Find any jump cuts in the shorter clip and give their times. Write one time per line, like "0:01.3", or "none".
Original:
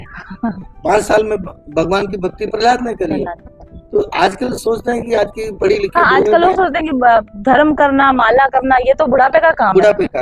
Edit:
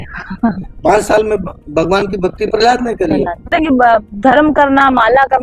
0:03.5

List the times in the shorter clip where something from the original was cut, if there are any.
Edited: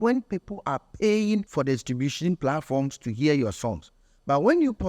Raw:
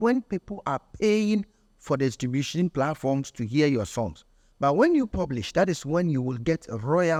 0:01.5

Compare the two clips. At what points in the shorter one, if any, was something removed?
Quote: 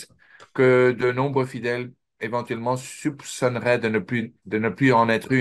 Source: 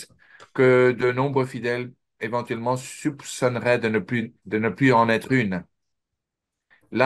none

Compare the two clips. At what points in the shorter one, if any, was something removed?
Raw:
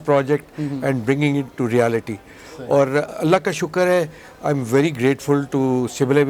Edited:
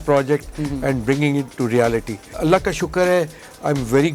0:02.3

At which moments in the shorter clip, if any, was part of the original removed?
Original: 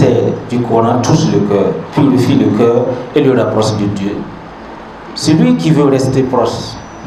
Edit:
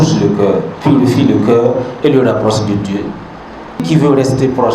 0:03.8

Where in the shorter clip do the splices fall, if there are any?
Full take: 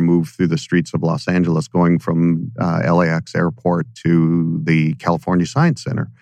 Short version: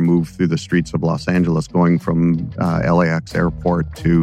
none

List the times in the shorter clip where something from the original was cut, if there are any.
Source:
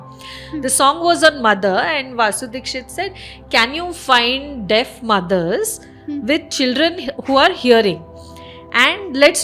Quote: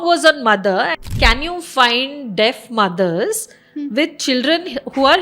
0:01.0

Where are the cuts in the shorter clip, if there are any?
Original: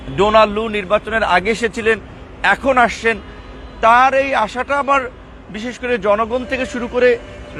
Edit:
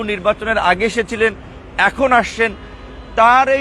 none

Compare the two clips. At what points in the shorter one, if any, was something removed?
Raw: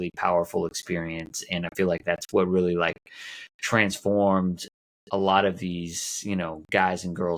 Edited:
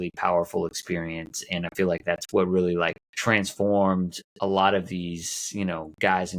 0:03.1
0:04.2

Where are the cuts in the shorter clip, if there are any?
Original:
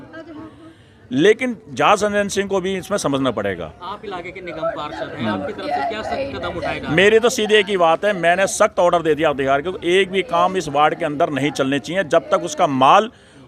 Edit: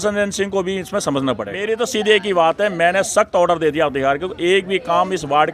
0:01.7

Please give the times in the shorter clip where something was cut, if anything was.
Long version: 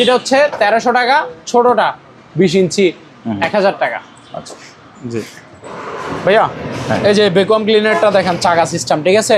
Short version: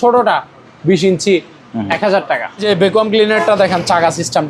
0:02.6

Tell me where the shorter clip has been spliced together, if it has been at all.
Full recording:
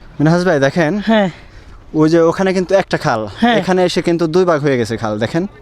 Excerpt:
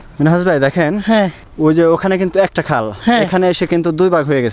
0:01.4

